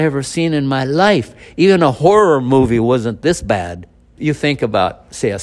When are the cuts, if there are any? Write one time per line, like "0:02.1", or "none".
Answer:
0:04.2